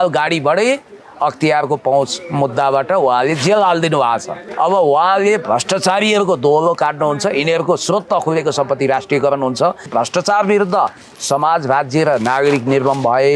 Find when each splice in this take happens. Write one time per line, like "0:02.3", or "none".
0:04.4
0:09.9